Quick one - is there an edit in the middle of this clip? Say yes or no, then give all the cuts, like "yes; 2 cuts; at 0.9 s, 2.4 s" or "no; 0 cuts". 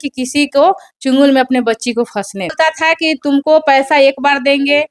yes; 1 cut; at 2.5 s